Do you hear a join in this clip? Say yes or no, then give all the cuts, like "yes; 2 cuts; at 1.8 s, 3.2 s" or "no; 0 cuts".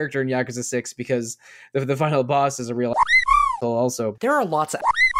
yes; 1 cut; at 4.1 s